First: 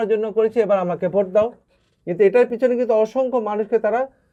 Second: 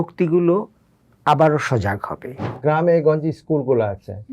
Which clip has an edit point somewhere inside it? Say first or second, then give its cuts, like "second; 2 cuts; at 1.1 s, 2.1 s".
second; 1 cut; at 2.5 s